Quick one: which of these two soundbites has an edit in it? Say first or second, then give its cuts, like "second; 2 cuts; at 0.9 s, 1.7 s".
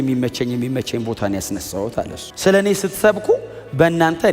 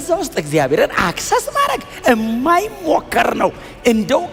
first; 1 cut; at 2.2 s